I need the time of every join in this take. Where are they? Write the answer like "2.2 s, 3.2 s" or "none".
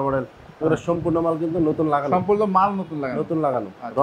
none